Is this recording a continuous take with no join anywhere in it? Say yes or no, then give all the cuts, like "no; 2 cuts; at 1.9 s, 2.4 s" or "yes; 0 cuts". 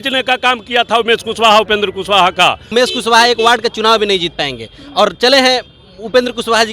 no; 1 cut; at 2.7 s